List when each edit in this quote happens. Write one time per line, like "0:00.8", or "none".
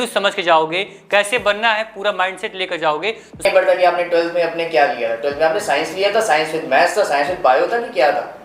0:03.4